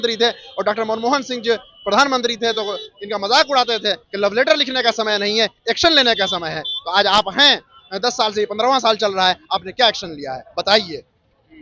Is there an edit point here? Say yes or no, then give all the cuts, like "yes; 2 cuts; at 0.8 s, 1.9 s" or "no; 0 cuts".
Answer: no; 0 cuts